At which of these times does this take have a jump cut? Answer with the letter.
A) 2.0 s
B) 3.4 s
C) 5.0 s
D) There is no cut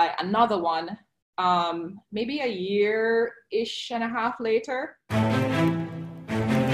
C